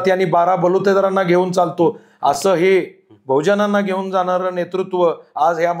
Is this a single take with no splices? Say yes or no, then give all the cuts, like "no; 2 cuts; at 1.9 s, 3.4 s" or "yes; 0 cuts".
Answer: yes; 0 cuts